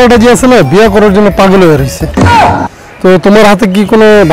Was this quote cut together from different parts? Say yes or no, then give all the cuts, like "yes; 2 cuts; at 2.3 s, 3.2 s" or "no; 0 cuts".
no; 0 cuts